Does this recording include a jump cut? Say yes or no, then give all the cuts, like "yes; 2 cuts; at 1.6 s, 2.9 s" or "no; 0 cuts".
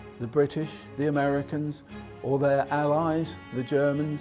no; 0 cuts